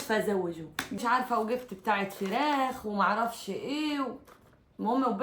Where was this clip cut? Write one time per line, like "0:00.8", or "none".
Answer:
0:01.0